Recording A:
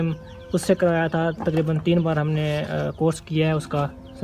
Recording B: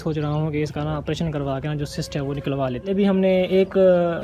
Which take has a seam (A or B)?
B